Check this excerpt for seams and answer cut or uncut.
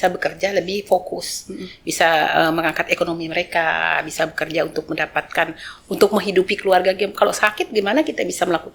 uncut